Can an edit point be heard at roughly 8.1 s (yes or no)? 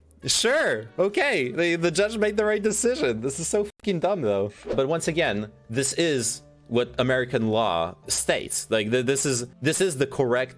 yes